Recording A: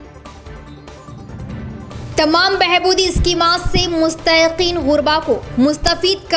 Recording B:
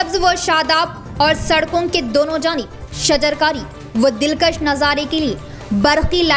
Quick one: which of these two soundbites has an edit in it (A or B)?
A